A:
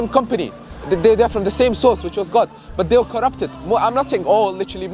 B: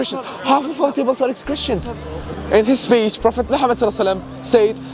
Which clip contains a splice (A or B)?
B